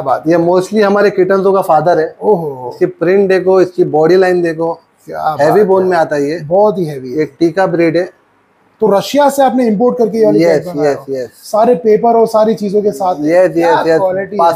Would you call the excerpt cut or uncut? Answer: uncut